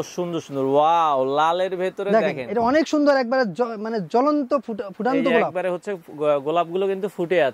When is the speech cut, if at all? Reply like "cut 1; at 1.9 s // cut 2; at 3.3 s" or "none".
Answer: none